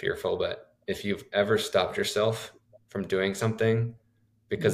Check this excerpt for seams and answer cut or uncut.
uncut